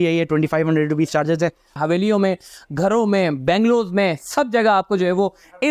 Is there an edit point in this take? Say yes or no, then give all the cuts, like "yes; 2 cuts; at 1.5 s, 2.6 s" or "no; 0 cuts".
yes; 1 cut; at 1.8 s